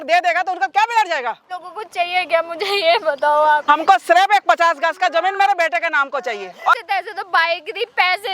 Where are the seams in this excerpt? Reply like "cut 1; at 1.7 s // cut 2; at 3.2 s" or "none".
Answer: cut 1; at 1.5 s // cut 2; at 3.6 s // cut 3; at 6.8 s